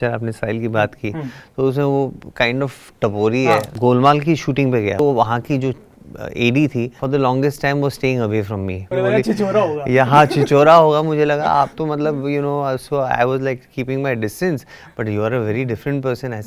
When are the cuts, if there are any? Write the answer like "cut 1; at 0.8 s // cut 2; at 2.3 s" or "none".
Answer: cut 1; at 3.7 s // cut 2; at 5.0 s // cut 3; at 7.0 s // cut 4; at 8.9 s